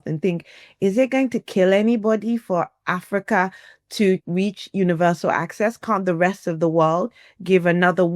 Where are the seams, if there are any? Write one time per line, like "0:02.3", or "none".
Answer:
0:04.2